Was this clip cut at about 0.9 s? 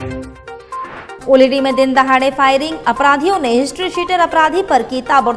yes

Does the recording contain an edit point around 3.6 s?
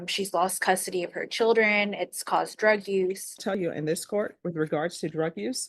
yes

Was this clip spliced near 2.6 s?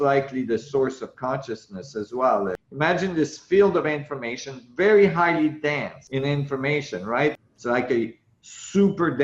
yes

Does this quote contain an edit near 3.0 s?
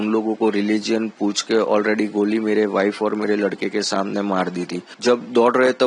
no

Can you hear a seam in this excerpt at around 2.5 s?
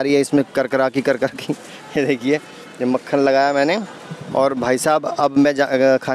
no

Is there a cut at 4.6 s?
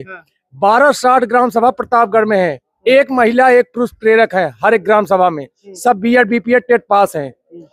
no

